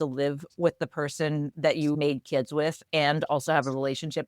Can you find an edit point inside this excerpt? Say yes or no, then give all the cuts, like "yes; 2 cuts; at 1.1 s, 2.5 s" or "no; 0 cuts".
yes; 1 cut; at 2.0 s